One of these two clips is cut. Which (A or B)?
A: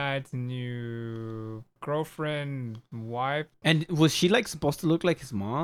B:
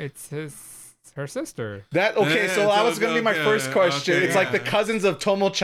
A